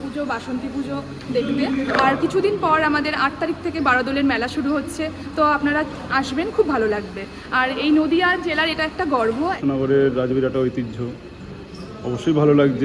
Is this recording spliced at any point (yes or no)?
yes